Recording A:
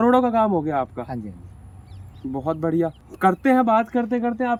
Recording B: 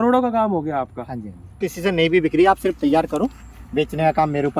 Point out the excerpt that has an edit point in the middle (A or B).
B